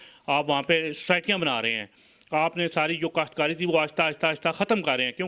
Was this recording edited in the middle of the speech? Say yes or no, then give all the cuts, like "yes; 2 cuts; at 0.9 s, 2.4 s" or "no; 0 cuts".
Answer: no; 0 cuts